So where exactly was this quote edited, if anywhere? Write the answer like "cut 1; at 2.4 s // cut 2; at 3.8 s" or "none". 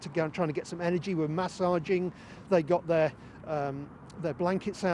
none